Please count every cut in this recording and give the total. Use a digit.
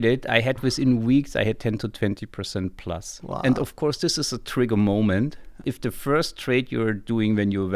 1